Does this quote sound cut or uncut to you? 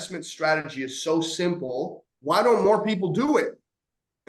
cut